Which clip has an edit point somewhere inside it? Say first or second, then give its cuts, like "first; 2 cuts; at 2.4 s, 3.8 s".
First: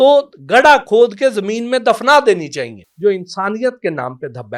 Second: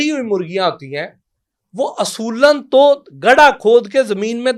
first; 1 cut; at 2.8 s